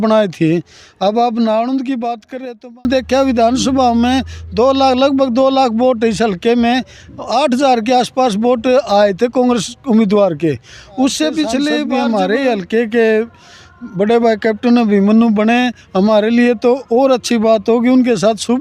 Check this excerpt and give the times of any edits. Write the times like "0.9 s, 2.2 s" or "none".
2.8 s, 11.8 s